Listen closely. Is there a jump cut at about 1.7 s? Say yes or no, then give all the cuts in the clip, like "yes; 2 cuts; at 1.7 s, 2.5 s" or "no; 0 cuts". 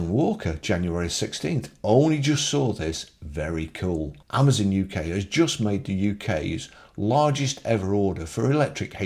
no; 1 cut; at 4.2 s